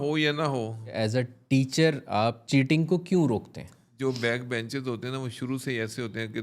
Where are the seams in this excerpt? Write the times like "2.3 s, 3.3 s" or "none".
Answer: 0.9 s, 2.4 s, 3.8 s